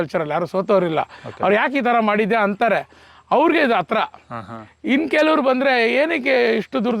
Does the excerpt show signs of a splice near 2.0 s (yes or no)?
no